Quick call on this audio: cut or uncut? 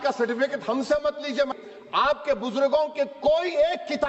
cut